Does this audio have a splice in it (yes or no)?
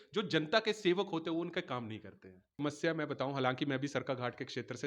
yes